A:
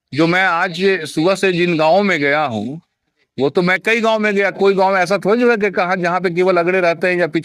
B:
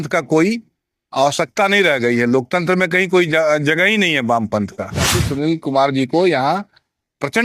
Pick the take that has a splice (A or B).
B